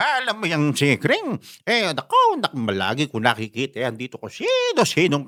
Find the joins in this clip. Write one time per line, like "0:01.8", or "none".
none

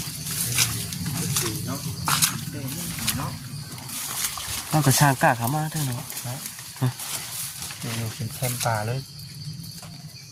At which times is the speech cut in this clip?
none

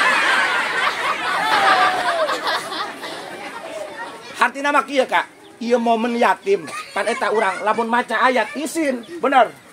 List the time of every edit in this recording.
0:01.6

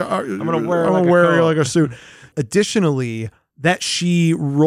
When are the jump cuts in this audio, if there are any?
0:02.2

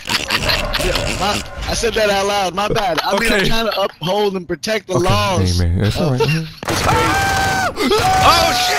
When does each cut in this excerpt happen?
none

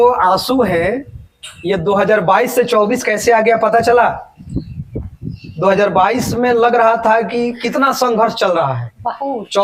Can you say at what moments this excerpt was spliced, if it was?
none

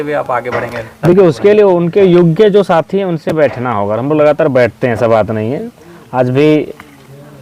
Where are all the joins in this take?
none

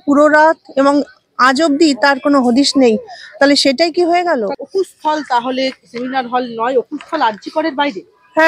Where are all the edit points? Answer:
0:04.5

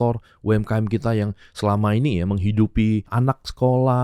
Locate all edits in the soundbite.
0:03.1

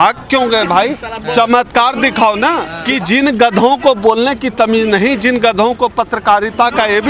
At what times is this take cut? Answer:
0:02.7

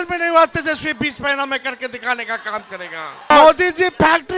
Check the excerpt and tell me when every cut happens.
0:03.3

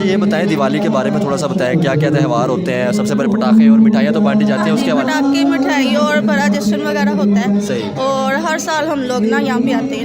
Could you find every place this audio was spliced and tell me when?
none

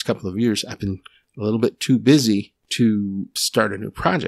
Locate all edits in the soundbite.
0:02.6
0:03.3

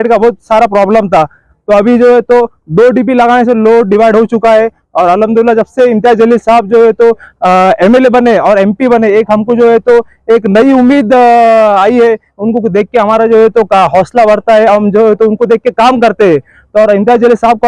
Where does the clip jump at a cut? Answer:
none

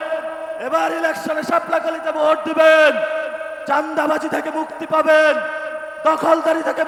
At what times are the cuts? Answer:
none

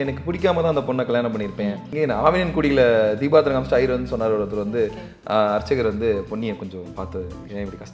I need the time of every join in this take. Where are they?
0:01.9

